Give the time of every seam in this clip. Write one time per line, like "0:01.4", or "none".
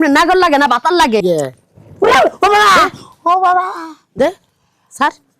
0:01.2